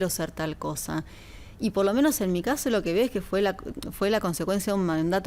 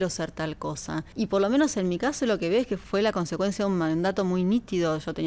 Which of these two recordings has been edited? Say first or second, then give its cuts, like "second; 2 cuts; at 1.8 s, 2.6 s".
second; 2 cuts; at 1.1 s, 2.8 s